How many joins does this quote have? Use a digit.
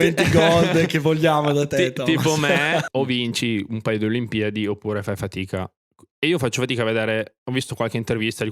1